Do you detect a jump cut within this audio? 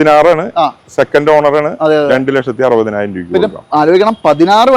no; 0 cuts

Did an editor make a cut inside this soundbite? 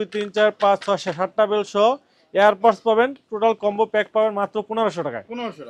no; 0 cuts

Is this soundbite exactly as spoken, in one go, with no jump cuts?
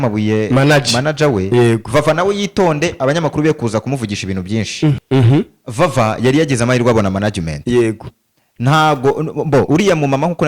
no; 1 cut; at 5.0 s

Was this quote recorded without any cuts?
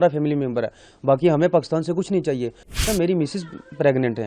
no; 1 cut; at 2.8 s

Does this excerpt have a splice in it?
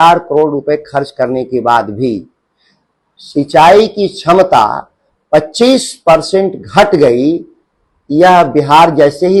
no; 0 cuts

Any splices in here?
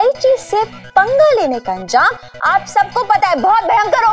no; 0 cuts

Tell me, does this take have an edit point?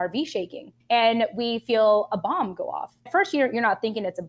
no; 0 cuts

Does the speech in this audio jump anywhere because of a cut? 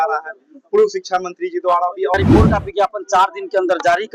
yes; 1 cut; at 2.1 s

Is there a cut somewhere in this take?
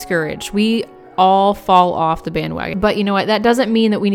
yes; 1 cut; at 2.6 s

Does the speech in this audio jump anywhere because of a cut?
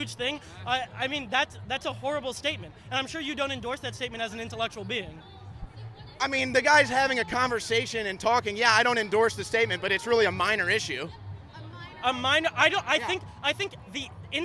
no; 0 cuts

